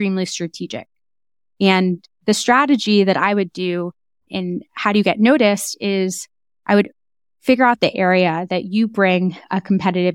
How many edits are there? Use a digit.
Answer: 1